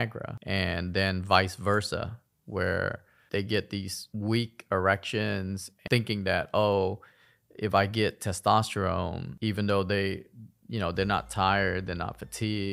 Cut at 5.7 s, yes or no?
yes